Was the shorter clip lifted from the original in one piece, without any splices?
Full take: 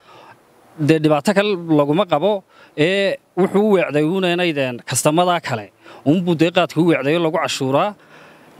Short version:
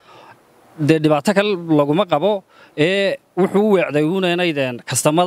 yes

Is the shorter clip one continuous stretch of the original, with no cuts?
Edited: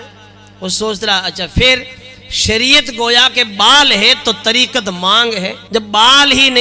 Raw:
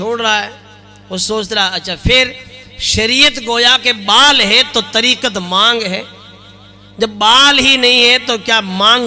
no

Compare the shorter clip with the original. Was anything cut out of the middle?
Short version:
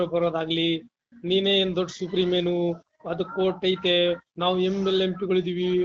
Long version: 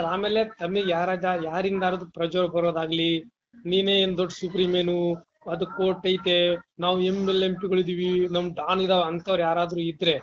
no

